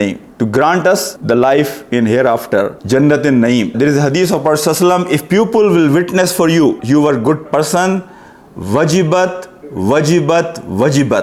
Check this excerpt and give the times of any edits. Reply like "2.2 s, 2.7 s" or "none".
none